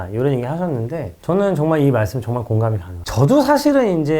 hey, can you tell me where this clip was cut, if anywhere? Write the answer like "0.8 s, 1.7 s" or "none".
3.0 s

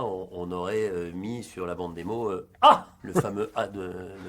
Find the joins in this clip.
2.9 s

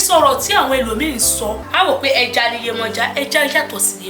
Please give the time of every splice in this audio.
1.6 s

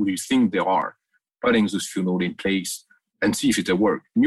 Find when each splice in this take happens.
3.1 s

